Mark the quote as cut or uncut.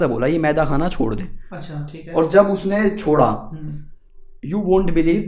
uncut